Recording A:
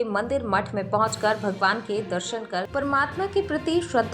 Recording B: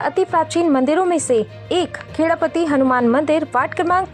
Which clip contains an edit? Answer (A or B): A